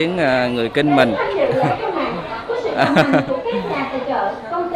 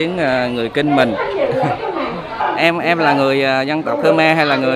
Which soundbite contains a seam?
second; 1 cut; at 2.4 s

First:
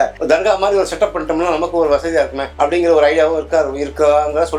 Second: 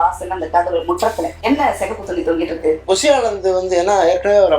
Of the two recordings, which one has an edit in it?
second; 2 cuts; at 1.4 s, 2.8 s

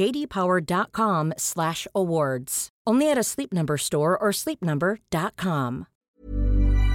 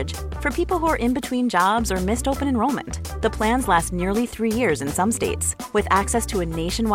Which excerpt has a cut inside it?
first; 1 cut; at 6.0 s

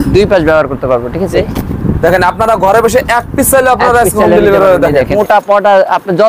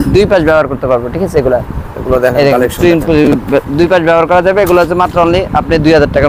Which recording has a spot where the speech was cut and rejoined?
first; 2 cuts; at 1.3 s, 5.1 s

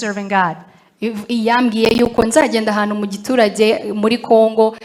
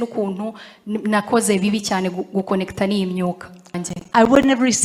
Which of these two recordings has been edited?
second; 1 cut; at 3.8 s

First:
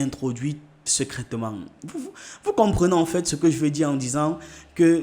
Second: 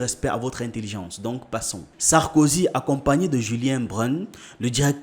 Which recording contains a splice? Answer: second; 1 cut; at 1.9 s

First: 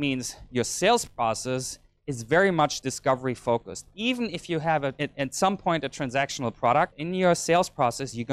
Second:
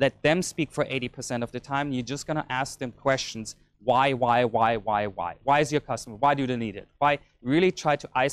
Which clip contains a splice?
first; 3 cuts; at 2.9 s, 5.0 s, 7.0 s

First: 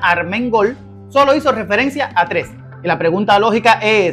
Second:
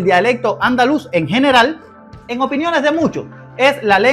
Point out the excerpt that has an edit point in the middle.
second; 1 cut; at 1.9 s

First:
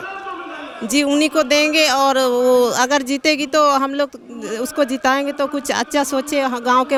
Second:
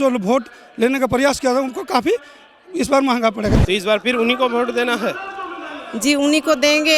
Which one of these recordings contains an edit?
second; 1 cut; at 3.5 s

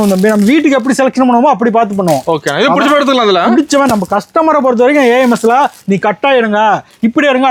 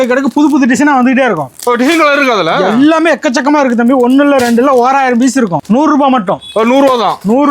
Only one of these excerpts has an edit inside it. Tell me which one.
second; 1 cut; at 5.6 s

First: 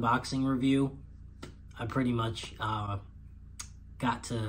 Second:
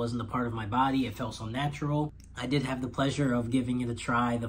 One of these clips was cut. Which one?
second; 1 cut; at 2.2 s

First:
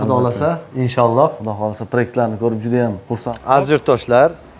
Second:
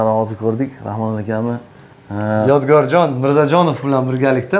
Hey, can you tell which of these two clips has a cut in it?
first; 1 cut; at 3.3 s

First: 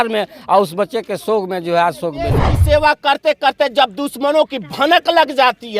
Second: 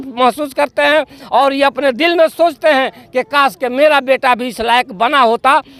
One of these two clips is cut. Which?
first; 1 cut; at 2.5 s

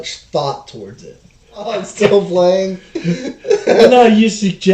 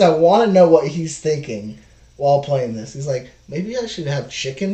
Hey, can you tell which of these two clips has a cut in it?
first; 1 cut; at 1.8 s

